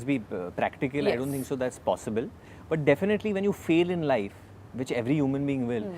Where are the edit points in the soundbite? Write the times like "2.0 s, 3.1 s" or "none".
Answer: none

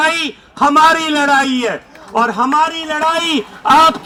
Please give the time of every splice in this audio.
none

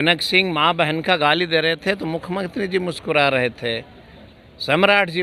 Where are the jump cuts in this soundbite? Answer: none

